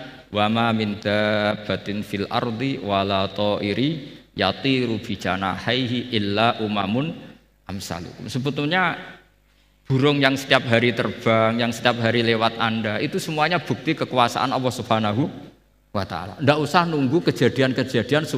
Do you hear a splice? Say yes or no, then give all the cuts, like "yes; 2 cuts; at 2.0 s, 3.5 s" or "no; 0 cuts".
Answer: no; 0 cuts